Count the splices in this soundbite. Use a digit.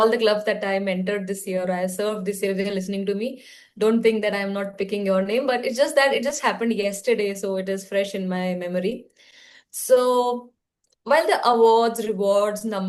0